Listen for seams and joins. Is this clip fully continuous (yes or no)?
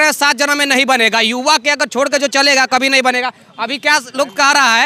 yes